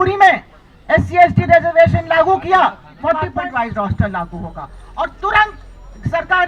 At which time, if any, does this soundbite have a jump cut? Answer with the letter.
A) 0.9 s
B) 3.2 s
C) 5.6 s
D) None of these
B